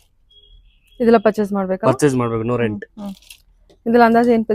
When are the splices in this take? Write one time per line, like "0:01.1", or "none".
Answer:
none